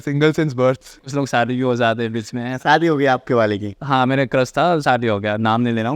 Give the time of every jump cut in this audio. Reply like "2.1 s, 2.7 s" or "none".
0.9 s